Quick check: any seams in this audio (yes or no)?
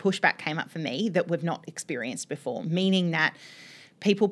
no